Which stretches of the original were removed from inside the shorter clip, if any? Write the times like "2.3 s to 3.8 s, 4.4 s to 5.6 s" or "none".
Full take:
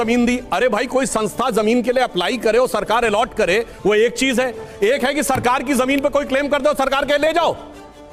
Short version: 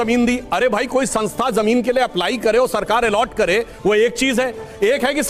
none